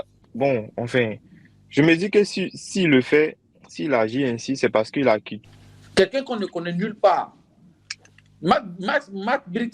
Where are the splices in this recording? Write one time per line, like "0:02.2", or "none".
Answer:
0:05.4